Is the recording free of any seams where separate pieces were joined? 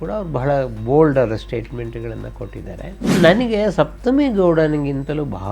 no; 1 cut; at 3.1 s

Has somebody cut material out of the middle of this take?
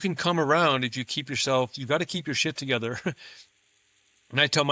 no; 0 cuts

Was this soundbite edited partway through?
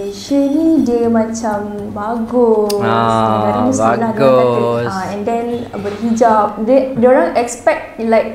no; 0 cuts

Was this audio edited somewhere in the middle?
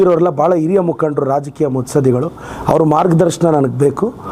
no; 0 cuts

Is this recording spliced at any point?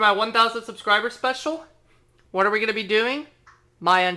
yes; 1 cut; at 2.5 s

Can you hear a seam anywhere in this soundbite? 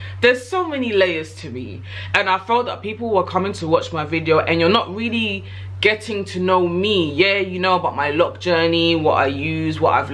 no; 0 cuts

